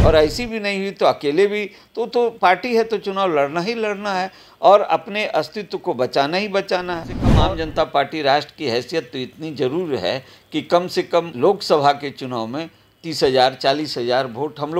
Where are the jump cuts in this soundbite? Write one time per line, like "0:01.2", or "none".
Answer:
0:07.2
0:11.3

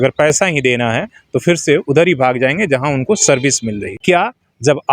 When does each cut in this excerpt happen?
0:03.9

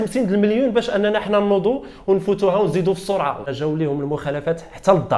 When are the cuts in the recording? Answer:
0:03.5

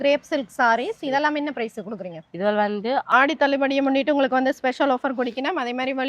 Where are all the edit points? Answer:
0:03.1

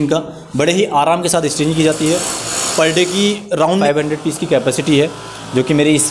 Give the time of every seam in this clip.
0:03.7

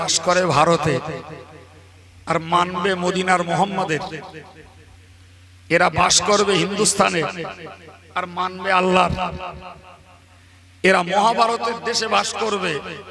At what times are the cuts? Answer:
none

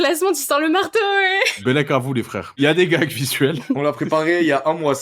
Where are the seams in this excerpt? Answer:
0:01.5
0:02.6
0:03.8

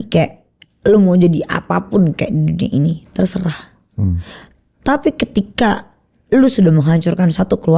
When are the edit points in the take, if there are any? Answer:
none

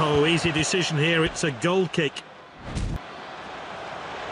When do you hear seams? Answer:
0:03.0

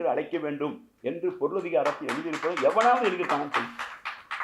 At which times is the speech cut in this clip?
none

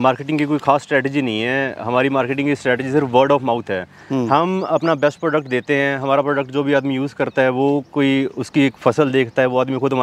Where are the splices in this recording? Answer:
none

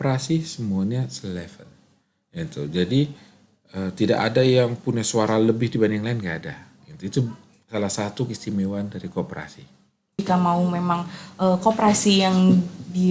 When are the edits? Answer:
0:10.2

